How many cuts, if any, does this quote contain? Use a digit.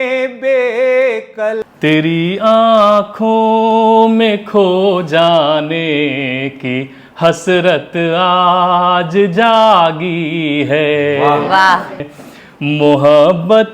2